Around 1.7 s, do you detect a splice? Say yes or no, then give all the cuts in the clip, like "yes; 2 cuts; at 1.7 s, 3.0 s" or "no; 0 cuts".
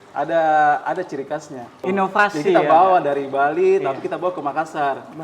yes; 1 cut; at 1.7 s